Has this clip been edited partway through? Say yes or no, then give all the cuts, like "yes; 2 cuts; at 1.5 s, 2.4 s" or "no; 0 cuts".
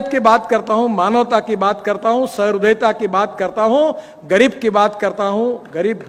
no; 0 cuts